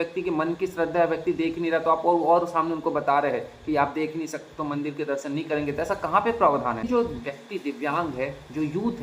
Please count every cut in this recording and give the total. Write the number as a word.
one